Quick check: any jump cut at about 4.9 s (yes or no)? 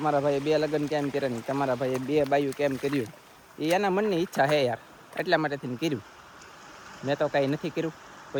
no